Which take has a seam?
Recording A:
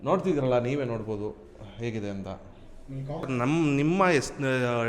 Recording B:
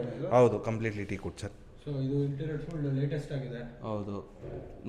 A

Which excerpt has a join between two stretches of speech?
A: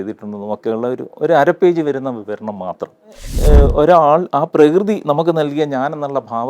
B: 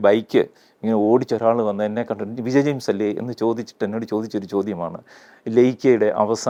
A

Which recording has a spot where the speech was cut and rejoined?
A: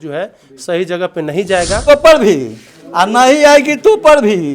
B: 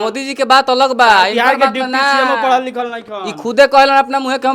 A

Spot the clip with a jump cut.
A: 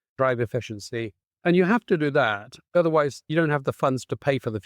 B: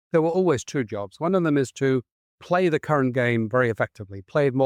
A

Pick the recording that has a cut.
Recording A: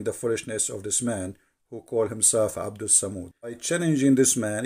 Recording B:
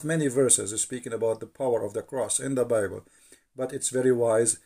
A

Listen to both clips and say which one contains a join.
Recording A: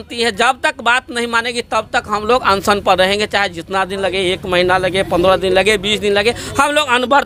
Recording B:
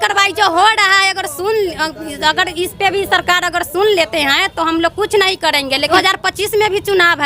B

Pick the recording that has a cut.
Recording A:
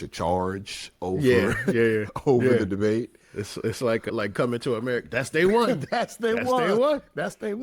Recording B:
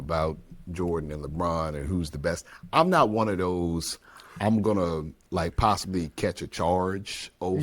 B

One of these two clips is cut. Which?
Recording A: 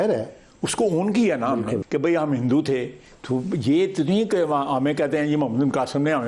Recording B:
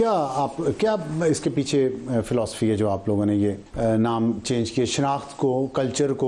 A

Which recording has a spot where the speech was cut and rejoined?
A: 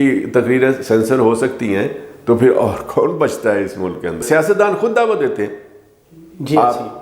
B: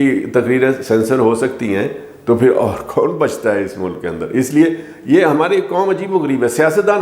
A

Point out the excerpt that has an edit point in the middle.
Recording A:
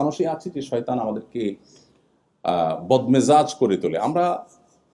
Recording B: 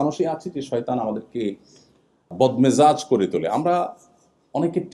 B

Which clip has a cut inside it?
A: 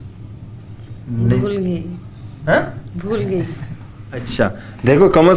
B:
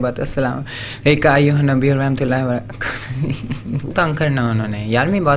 B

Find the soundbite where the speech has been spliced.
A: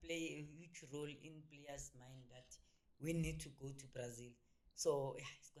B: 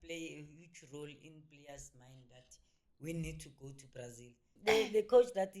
B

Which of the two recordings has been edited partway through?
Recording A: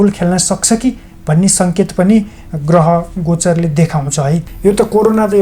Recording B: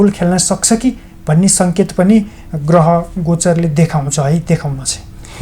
A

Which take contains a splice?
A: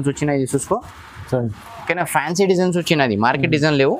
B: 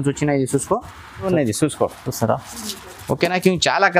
B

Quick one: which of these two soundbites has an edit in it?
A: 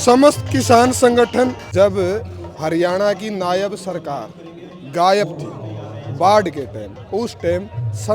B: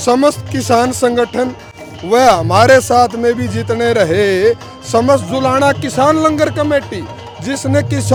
A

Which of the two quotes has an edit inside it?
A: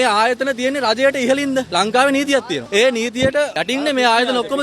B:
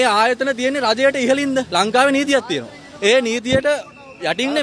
A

